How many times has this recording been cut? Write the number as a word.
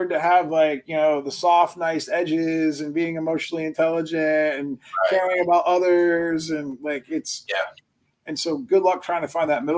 zero